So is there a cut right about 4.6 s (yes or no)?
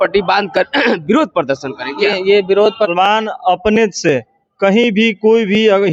no